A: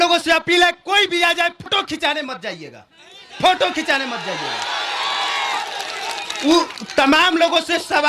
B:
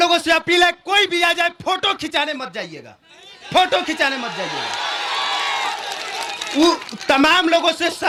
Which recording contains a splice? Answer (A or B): A